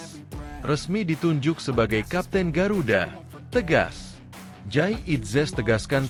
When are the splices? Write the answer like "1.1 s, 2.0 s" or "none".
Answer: none